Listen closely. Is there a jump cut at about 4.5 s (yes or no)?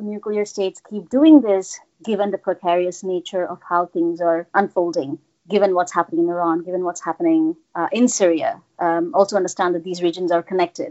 yes